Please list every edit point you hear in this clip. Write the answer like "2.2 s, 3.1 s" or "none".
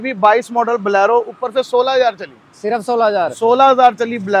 none